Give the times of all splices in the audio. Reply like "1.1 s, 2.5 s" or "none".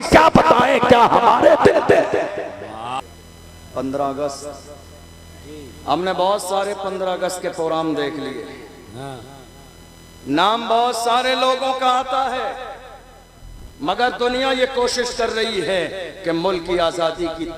3.0 s